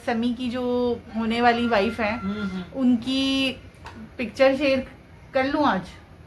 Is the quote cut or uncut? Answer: uncut